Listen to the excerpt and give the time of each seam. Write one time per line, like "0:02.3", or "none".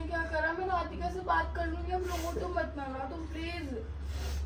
none